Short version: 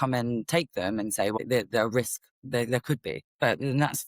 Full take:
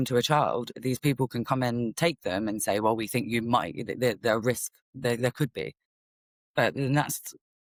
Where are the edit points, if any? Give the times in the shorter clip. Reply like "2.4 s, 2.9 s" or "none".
1.4 s, 3.3 s